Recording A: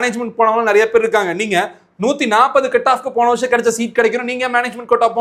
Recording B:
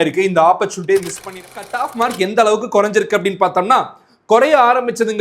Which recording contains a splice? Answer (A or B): B